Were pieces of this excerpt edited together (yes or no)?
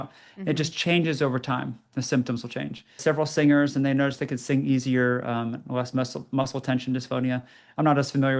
yes